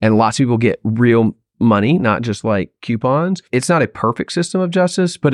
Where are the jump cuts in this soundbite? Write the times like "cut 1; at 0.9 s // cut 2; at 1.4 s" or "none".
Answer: cut 1; at 3.4 s